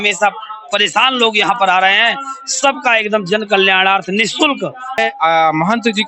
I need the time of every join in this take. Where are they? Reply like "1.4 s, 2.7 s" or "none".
5.0 s